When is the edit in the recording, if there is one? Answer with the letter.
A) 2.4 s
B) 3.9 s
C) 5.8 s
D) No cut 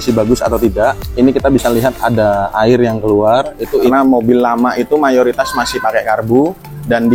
B